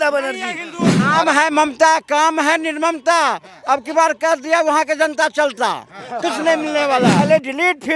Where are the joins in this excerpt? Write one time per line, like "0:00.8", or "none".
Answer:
0:01.0
0:07.2